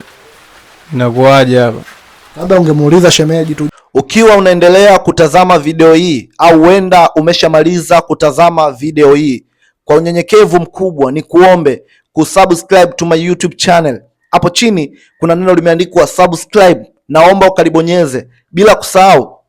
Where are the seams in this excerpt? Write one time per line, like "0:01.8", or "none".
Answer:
0:03.6